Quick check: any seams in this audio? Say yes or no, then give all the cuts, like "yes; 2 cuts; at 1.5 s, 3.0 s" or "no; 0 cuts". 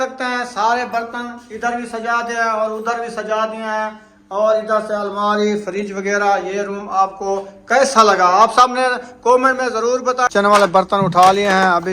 yes; 1 cut; at 10.3 s